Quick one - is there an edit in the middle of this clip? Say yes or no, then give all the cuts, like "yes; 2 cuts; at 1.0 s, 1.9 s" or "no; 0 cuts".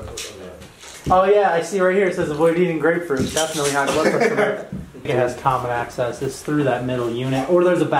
yes; 1 cut; at 5.1 s